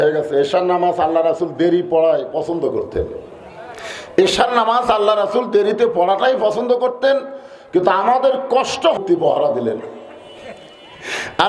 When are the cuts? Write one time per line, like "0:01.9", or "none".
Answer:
0:09.0